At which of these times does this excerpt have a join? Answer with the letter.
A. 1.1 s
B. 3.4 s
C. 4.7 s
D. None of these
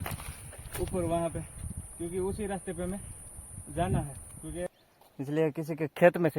C